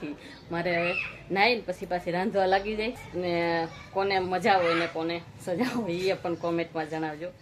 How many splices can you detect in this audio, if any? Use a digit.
1